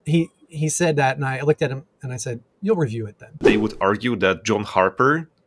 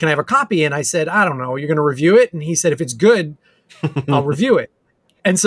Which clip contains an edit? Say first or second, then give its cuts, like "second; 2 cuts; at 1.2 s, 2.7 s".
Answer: first; 1 cut; at 3.5 s